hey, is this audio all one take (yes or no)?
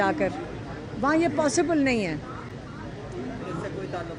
yes